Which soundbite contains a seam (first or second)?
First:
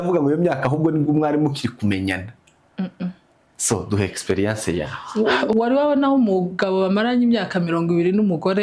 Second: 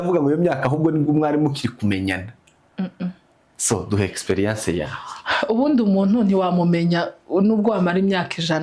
first